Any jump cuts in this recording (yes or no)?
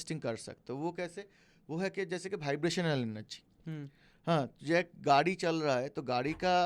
no